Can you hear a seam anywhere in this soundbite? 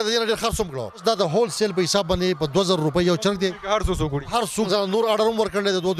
yes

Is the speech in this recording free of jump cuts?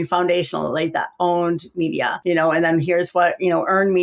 no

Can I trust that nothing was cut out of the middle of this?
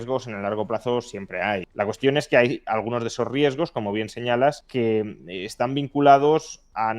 no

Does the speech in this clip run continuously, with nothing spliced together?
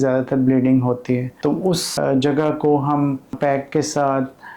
no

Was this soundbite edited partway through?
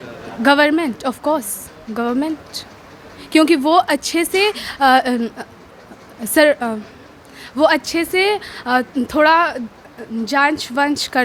no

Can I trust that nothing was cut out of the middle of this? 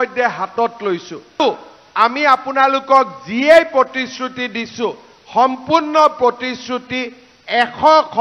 no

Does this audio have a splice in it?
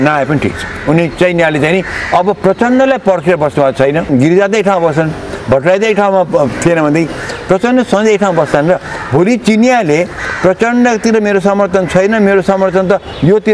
yes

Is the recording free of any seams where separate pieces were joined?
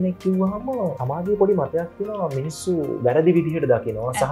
no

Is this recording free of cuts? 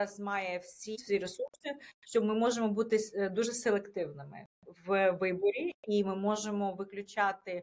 no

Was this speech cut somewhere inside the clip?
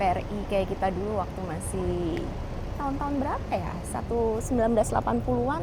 no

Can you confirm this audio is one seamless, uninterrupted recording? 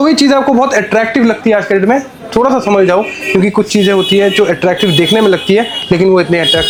yes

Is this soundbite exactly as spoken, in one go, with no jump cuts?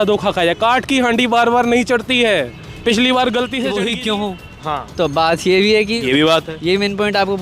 no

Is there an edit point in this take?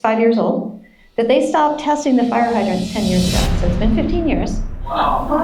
no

